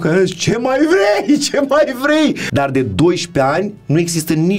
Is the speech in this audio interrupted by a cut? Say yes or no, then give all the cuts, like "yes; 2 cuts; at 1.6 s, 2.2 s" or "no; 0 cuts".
yes; 1 cut; at 2.4 s